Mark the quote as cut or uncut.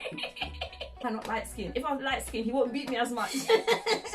cut